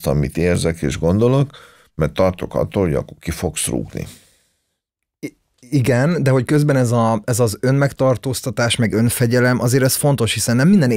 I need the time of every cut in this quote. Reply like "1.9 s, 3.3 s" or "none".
none